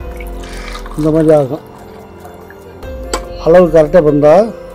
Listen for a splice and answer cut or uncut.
cut